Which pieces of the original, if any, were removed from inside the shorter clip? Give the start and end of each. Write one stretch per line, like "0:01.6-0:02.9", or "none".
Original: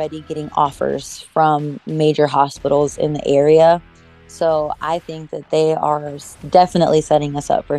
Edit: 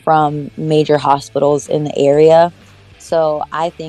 none